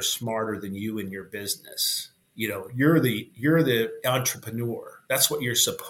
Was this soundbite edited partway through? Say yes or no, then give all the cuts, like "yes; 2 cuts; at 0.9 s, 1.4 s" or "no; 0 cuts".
no; 0 cuts